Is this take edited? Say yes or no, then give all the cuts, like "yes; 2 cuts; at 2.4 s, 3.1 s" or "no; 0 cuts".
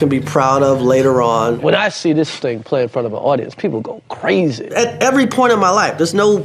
yes; 2 cuts; at 1.6 s, 4.7 s